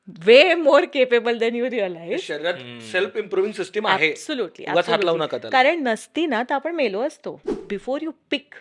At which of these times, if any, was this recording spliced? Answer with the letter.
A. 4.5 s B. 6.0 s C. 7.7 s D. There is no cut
C